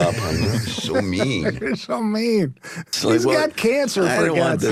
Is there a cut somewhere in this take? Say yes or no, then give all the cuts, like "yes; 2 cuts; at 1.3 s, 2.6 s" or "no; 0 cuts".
no; 0 cuts